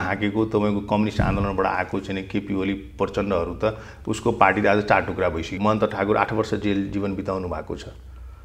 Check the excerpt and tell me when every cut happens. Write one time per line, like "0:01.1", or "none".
0:05.5